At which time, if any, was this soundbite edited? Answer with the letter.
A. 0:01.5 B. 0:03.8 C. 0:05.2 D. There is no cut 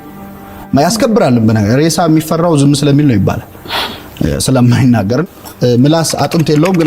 C